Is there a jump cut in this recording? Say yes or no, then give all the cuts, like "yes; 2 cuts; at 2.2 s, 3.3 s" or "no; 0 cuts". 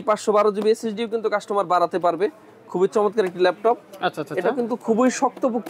no; 0 cuts